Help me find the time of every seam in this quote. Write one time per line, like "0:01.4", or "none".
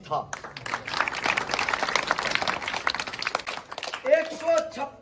0:03.4